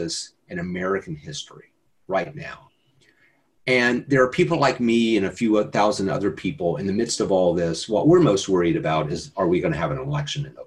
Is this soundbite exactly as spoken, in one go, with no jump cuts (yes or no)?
yes